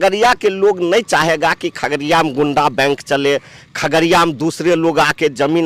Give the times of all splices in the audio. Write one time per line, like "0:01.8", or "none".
none